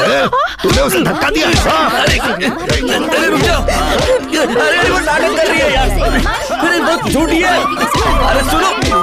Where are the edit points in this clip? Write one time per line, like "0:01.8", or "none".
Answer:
none